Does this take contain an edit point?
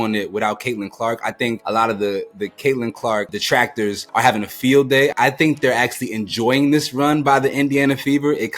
yes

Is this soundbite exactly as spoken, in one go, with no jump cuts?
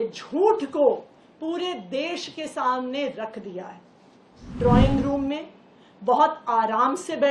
no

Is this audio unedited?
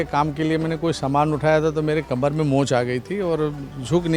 yes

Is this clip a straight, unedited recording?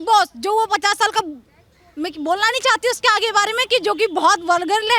yes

